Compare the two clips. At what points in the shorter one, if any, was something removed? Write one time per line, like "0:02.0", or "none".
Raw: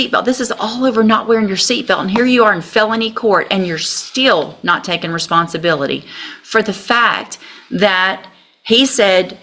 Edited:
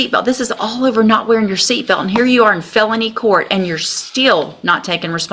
none